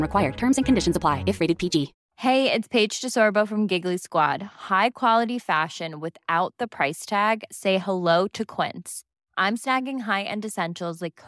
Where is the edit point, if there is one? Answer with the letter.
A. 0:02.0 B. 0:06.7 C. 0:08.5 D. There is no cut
A